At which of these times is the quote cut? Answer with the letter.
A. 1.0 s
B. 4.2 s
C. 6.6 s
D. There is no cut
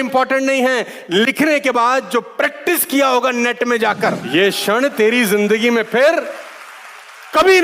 B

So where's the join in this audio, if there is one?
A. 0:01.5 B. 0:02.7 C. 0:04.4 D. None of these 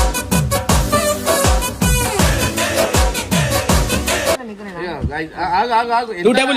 C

